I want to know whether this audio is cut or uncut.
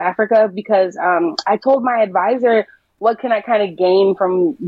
cut